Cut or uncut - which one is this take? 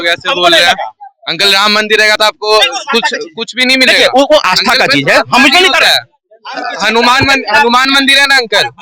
uncut